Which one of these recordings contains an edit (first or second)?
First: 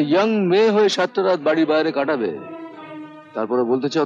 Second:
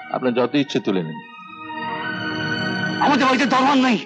second